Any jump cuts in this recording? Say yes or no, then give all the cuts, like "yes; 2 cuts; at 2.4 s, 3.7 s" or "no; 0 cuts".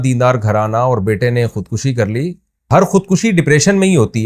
yes; 1 cut; at 2.7 s